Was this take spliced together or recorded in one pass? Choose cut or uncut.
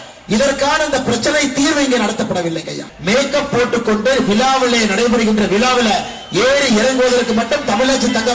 cut